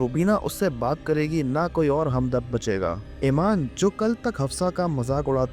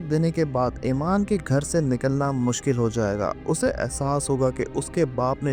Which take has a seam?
first; 2 cuts; at 3.1 s, 3.7 s

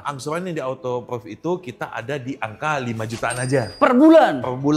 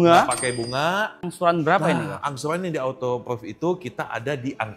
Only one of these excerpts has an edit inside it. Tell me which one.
second; 1 cut; at 1.2 s

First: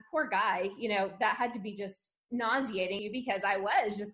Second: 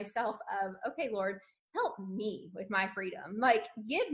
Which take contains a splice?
first; 1 cut; at 3.0 s

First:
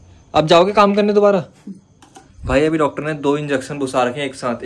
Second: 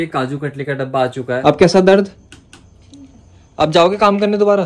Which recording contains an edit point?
second; 1 cut; at 1.4 s

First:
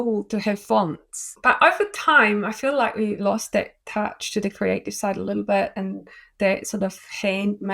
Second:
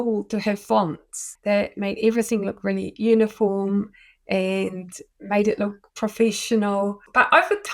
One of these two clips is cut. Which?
first; 1 cut; at 1.3 s

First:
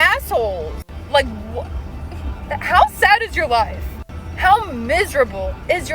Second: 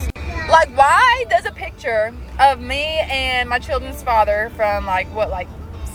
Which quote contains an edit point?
first; 1 cut; at 1.3 s

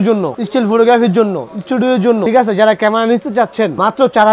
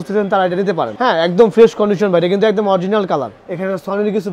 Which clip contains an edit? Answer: second; 1 cut; at 3.3 s

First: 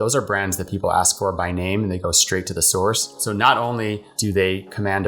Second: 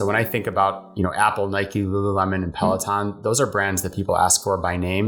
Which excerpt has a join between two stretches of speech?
first; 2 cuts; at 3.0 s, 4.1 s

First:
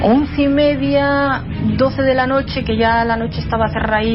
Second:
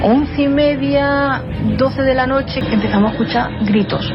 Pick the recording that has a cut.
second; 1 cut; at 2.6 s

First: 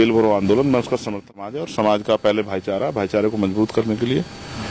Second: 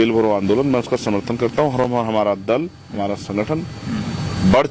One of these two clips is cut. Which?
first; 1 cut; at 1.4 s

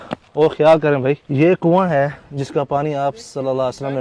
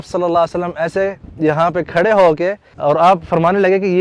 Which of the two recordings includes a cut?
first; 1 cut; at 1.2 s

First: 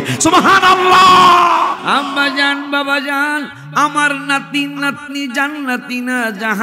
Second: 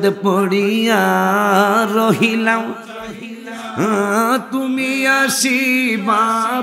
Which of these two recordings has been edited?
first; 1 cut; at 1.8 s

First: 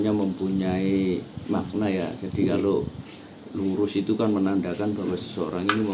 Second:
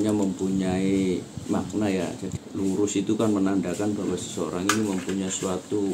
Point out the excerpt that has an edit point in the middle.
second; 1 cut; at 2.2 s

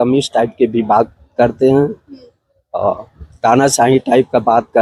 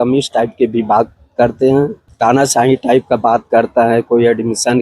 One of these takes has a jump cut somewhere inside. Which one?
second; 1 cut; at 2.0 s

